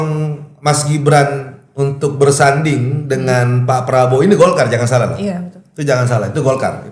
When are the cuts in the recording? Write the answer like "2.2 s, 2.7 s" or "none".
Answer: none